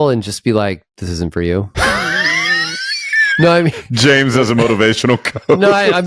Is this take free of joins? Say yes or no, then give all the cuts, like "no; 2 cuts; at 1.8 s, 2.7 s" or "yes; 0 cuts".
no; 1 cut; at 1.8 s